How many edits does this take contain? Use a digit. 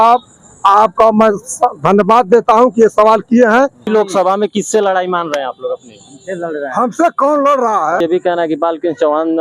2